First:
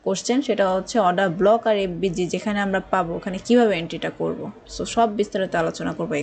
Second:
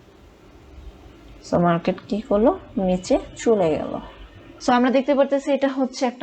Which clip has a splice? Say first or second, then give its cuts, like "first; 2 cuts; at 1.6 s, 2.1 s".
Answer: second; 1 cut; at 4.5 s